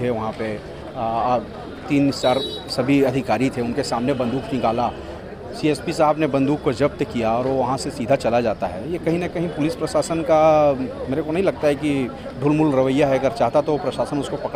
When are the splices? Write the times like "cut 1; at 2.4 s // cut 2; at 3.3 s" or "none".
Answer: none